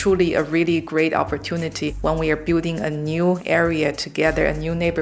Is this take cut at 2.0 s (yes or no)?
yes